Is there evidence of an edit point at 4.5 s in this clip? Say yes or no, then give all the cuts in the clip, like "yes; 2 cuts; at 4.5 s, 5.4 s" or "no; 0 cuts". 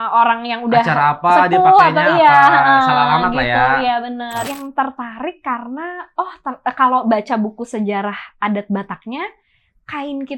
yes; 1 cut; at 4.5 s